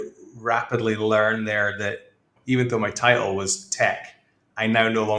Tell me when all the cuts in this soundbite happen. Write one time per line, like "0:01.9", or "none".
none